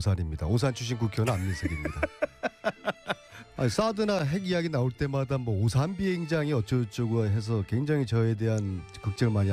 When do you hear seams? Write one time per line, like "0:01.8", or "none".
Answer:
none

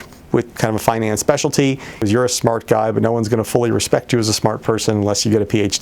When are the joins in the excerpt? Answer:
0:02.0

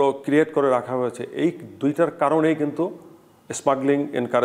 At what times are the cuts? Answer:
none

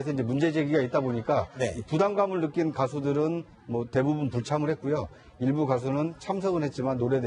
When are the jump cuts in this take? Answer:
none

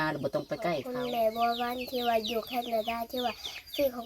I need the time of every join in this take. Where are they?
0:01.1

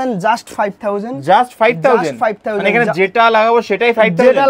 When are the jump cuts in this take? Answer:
none

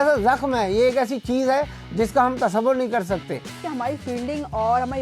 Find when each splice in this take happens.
0:03.5

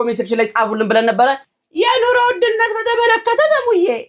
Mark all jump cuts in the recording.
0:01.4

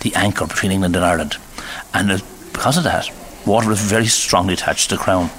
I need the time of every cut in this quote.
0:04.2

